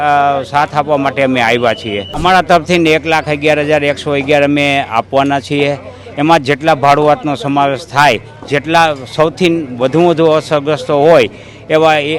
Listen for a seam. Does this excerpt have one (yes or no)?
yes